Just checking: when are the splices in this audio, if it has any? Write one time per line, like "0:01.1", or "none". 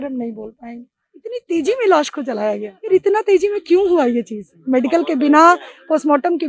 0:01.4
0:02.9